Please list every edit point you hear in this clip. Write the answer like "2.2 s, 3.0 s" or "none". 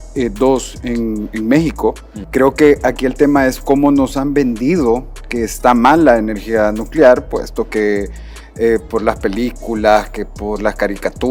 2.1 s

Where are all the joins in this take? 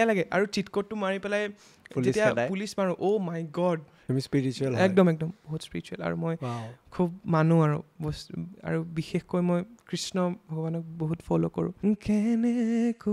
3.9 s, 11.7 s

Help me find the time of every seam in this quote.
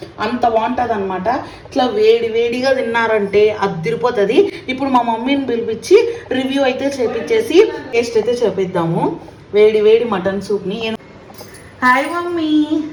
none

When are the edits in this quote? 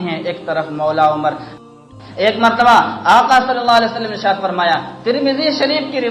1.5 s

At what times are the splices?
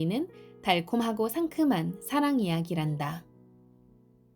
3.3 s

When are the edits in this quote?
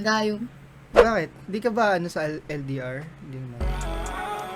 none

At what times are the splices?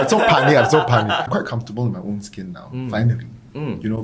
1.3 s

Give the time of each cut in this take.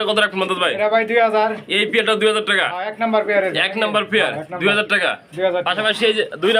none

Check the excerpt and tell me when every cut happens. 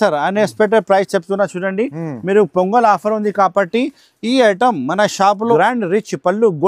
5.5 s

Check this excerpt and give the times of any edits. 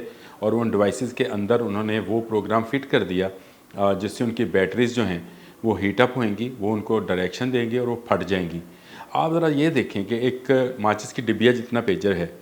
none

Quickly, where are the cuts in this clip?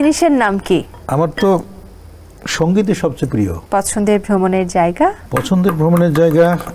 1.0 s, 3.6 s, 5.2 s

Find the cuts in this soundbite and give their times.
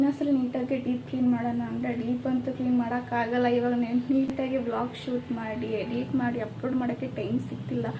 4.3 s

